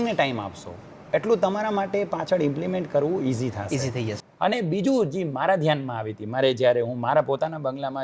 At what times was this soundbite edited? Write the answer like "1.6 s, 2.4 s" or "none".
4.2 s